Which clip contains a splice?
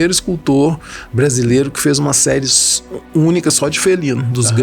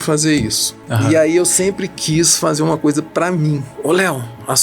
second; 1 cut; at 3.7 s

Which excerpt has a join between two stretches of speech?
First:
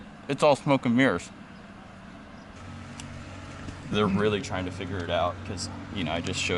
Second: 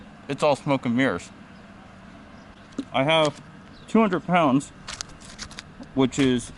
first; 2 cuts; at 2.6 s, 3.9 s

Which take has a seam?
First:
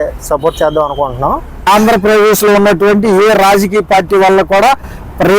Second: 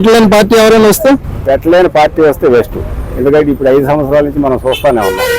first; 1 cut; at 1.7 s

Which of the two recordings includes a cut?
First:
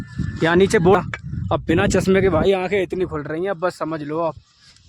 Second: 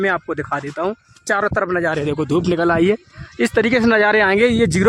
first; 1 cut; at 0.9 s

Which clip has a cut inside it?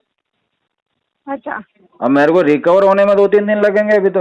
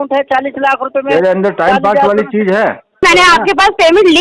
second; 1 cut; at 3.0 s

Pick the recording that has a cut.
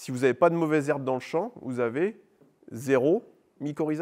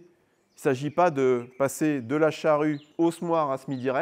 second; 1 cut; at 2.9 s

